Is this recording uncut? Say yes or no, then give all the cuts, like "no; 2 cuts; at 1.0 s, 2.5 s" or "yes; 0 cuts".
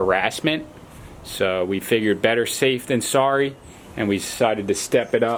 yes; 0 cuts